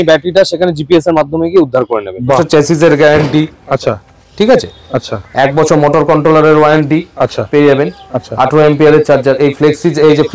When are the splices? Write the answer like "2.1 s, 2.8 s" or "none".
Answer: 2.4 s